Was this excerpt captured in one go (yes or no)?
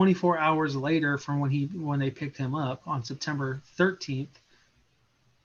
yes